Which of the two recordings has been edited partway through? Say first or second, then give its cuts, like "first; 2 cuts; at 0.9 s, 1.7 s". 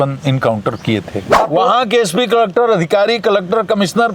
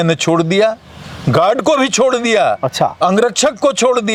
first; 1 cut; at 1.5 s